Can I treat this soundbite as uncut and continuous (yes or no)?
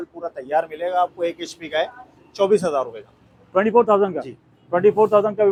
yes